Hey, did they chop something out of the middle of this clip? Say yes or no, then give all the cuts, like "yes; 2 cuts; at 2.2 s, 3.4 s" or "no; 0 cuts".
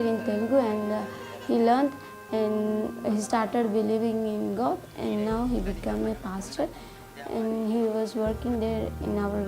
yes; 1 cut; at 5.2 s